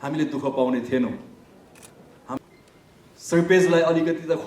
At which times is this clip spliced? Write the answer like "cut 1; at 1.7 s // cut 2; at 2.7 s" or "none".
cut 1; at 2.4 s